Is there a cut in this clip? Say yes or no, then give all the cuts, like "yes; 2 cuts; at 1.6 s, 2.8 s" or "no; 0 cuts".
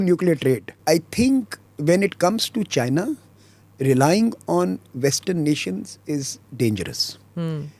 yes; 1 cut; at 1.2 s